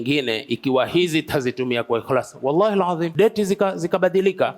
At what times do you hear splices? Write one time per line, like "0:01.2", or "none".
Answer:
0:03.1